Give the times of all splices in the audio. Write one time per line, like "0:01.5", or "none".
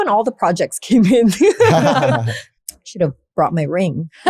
0:02.4